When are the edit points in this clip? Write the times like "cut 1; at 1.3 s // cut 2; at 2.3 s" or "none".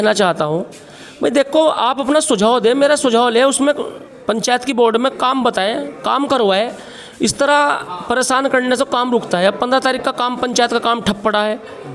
none

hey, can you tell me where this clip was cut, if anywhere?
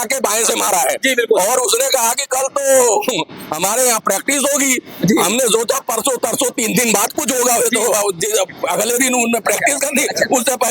none

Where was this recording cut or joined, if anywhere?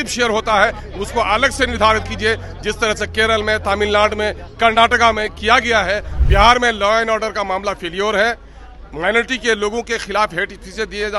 cut 1; at 6.1 s

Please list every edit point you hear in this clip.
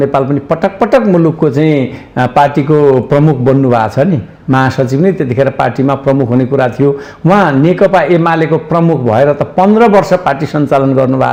none

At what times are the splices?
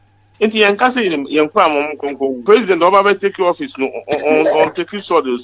cut 1; at 2.4 s

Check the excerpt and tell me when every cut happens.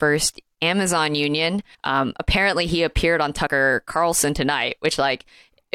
cut 1; at 1.7 s // cut 2; at 3.5 s

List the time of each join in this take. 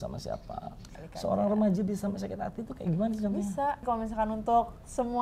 cut 1; at 1.0 s // cut 2; at 3.8 s

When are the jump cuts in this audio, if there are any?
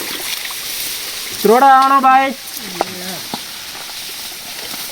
none

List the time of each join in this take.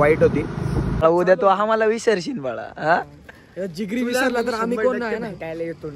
cut 1; at 1.0 s

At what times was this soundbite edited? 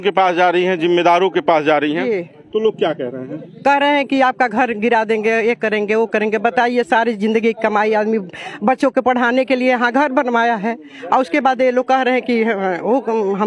none

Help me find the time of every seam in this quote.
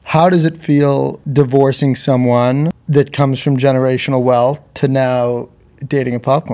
cut 1; at 1.2 s // cut 2; at 2.8 s

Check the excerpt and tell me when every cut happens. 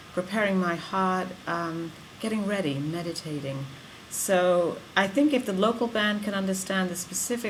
none

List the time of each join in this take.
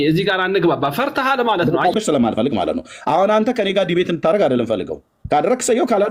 cut 1; at 1.9 s

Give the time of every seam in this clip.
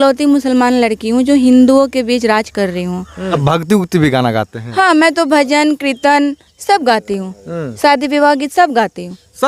cut 1; at 3.4 s

